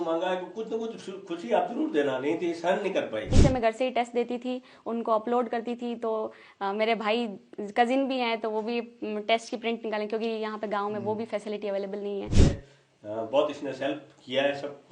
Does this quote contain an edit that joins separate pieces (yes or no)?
yes